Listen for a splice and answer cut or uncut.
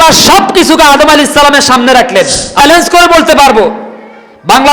cut